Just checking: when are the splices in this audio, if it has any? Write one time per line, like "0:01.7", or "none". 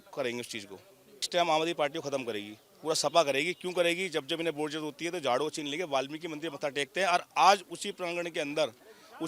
0:01.2